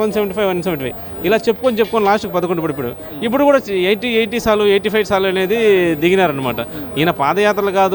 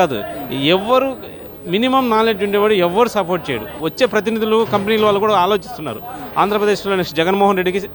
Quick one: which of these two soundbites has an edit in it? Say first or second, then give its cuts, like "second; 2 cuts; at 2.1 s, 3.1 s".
second; 1 cut; at 3.8 s